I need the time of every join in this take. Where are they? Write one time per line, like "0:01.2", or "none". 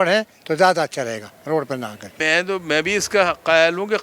0:02.2